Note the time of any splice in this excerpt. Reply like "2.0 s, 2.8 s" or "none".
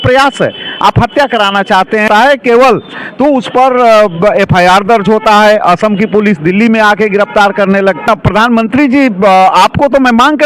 2.1 s, 8.1 s